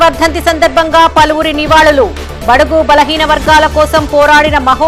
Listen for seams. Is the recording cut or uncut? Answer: uncut